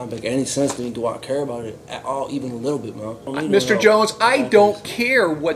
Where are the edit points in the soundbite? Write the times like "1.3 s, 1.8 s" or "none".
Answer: 3.3 s